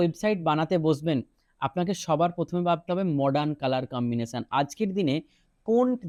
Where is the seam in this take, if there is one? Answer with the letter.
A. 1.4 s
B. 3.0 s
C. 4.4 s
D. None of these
D